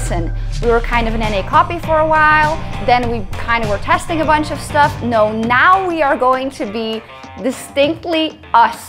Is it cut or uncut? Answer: uncut